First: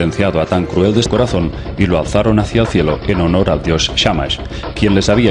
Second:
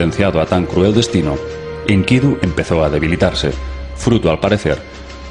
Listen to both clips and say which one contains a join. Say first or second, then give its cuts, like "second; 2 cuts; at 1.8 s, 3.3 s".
second; 1 cut; at 1.1 s